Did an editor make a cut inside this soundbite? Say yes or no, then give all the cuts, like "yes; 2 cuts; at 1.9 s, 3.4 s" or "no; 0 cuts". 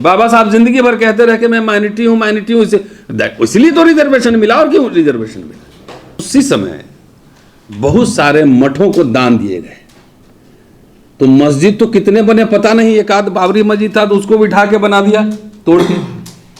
yes; 1 cut; at 6.3 s